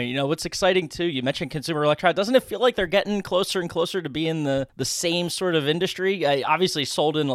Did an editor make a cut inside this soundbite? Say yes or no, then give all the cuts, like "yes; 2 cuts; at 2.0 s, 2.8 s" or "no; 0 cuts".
yes; 1 cut; at 4.8 s